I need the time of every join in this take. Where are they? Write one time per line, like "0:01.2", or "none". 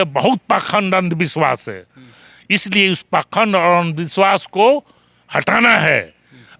none